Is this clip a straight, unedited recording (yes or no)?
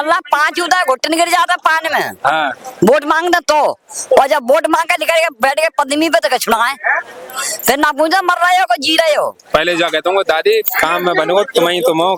yes